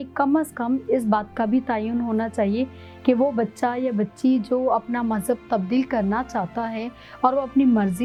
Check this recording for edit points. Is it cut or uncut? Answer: uncut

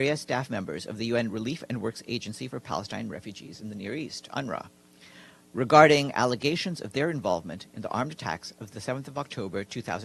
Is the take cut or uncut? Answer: uncut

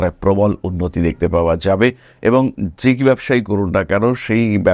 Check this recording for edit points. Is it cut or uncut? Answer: uncut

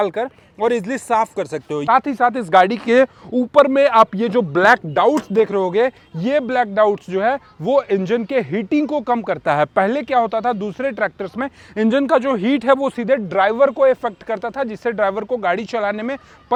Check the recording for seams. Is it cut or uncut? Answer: uncut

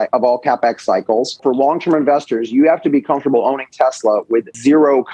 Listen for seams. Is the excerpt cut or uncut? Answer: cut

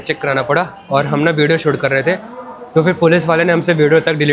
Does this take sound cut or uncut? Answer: uncut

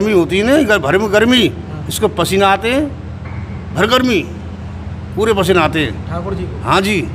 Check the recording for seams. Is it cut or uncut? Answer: uncut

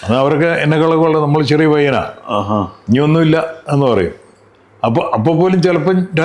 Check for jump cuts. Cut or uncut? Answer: uncut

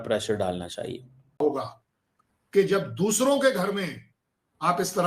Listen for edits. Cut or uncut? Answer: cut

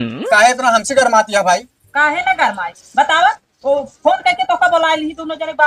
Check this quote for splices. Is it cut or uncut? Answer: uncut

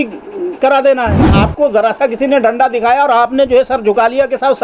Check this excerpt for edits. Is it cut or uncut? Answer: cut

